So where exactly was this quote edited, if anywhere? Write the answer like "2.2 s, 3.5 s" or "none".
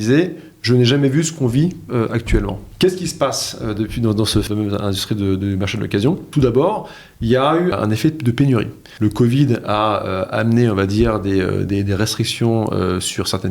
2.6 s, 4.5 s, 6.3 s, 7.7 s, 8.8 s